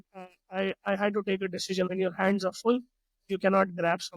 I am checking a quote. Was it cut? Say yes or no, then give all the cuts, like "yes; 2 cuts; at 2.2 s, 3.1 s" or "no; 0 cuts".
yes; 1 cut; at 1.9 s